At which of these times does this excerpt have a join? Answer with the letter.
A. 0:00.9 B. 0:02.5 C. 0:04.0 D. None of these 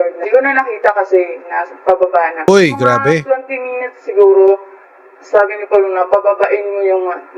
B